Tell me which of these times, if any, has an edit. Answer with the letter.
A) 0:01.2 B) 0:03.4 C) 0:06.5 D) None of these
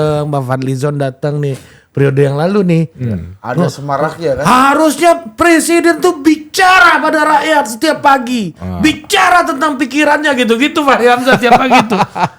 D